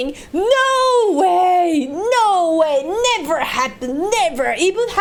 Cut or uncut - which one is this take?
uncut